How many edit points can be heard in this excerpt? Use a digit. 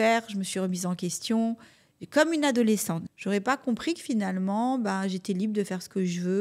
1